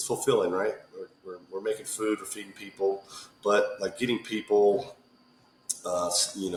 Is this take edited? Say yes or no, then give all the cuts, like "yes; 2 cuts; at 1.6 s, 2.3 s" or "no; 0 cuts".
no; 0 cuts